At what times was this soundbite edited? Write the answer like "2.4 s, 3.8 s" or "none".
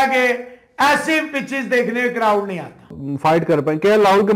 3.0 s